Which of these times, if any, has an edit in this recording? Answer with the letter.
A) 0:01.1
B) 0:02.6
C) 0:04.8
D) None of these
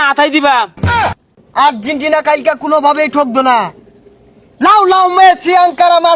A